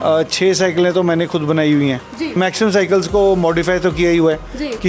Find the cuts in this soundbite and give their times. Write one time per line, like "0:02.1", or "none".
0:02.4